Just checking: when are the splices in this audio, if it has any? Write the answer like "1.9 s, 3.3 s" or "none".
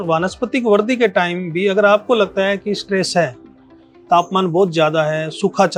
none